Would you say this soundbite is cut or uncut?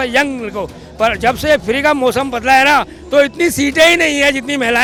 uncut